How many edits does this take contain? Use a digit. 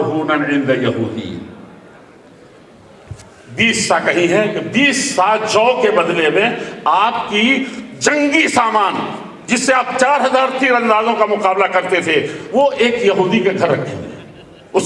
0